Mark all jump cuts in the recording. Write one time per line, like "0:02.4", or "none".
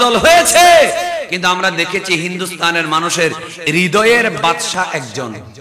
0:03.6